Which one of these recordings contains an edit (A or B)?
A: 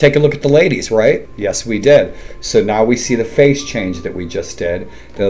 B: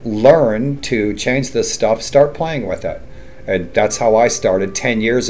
A